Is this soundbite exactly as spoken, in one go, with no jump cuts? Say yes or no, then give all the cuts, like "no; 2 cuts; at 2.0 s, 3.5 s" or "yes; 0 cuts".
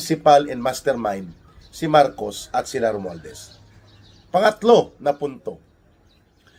yes; 0 cuts